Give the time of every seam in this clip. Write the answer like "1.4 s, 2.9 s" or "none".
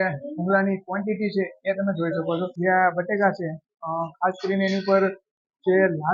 2.5 s